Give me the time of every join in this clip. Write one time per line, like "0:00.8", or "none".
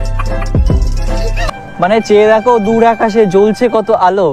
0:01.5

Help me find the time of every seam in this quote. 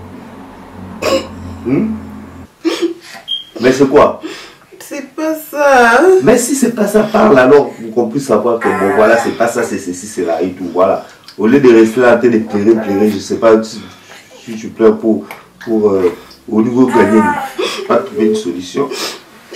0:02.5
0:17.8

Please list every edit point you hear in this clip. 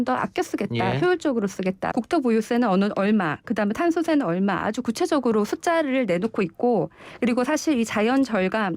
0:01.9

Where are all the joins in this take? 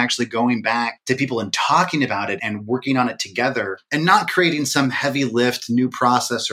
0:01.0
0:02.4
0:03.8

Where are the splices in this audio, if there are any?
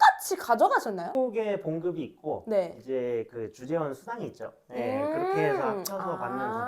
0:01.1

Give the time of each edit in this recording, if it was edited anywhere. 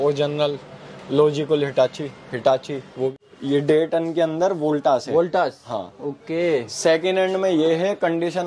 0:03.1

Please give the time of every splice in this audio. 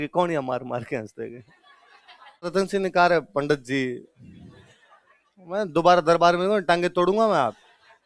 0:02.5

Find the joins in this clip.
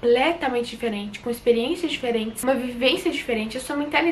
0:02.3

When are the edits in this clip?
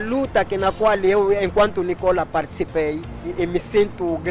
0:03.4

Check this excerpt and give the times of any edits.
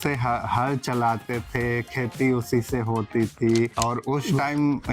0:03.7

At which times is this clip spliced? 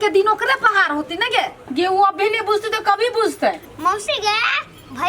0:03.6

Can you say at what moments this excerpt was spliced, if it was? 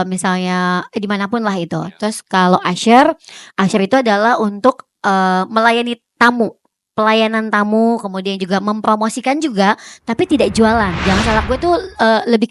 0:11.4

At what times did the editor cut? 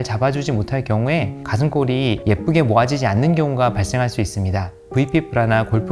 0:04.9

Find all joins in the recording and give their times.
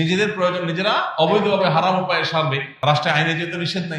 0:02.7

